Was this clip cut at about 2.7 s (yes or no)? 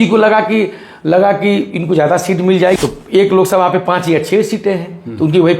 yes